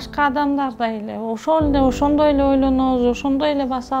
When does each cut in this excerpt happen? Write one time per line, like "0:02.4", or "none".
none